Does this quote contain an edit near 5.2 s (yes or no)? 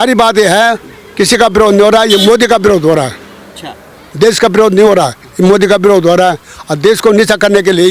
no